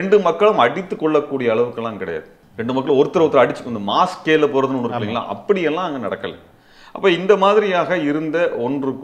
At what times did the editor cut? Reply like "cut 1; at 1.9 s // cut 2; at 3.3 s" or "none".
none